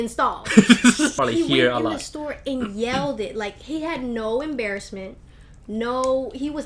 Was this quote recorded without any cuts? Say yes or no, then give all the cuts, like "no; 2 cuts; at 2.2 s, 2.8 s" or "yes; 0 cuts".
no; 1 cut; at 1.1 s